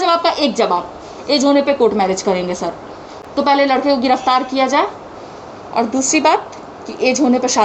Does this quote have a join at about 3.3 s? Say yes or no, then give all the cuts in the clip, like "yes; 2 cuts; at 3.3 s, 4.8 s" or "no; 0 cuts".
no; 0 cuts